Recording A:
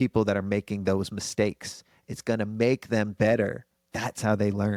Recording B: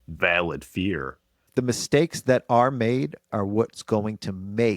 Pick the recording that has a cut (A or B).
B